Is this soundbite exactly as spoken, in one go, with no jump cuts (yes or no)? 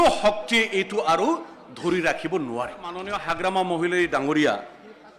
no